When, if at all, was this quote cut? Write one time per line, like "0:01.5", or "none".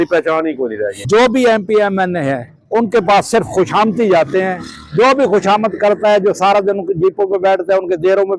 0:00.9

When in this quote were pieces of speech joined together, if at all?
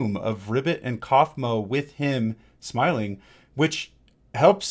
none

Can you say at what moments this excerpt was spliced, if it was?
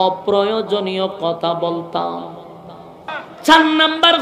0:03.2

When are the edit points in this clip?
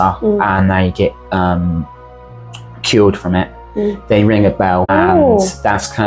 0:04.9

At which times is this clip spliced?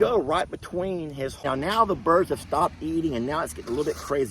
0:01.4

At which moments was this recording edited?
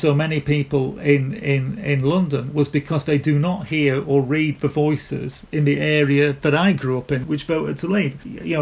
0:07.2

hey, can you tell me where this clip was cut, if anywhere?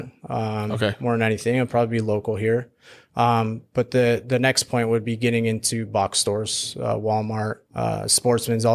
0:07.6

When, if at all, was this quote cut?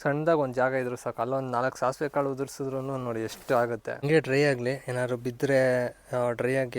0:04.0

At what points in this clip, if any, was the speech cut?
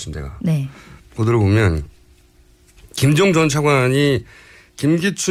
none

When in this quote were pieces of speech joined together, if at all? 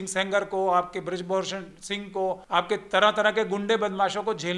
0:02.4

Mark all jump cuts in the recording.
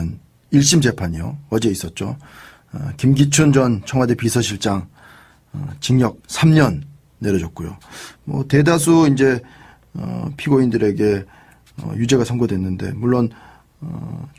none

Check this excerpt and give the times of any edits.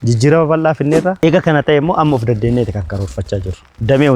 0:01.2

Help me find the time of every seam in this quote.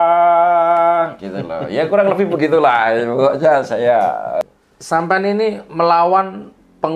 0:04.4

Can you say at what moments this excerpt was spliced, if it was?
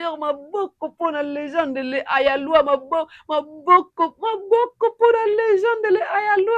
none

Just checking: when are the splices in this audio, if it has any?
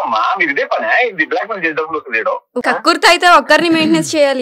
0:02.6

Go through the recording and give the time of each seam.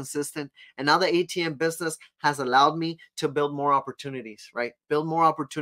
none

